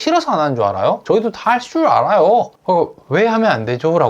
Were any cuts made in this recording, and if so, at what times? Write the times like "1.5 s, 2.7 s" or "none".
1.0 s, 2.6 s